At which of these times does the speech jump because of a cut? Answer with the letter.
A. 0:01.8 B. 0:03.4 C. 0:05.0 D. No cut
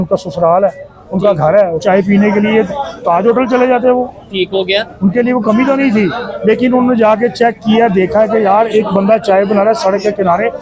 A